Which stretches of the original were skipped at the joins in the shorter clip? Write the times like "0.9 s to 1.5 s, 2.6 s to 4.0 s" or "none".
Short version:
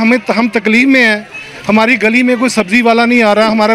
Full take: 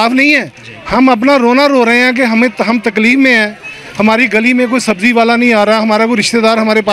none